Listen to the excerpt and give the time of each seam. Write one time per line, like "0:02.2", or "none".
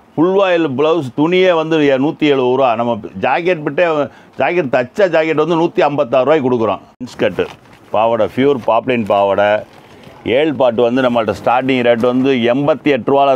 0:06.9